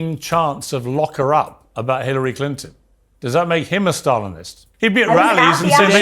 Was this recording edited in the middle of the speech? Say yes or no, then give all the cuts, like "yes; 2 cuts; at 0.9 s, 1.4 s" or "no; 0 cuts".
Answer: yes; 1 cut; at 4.6 s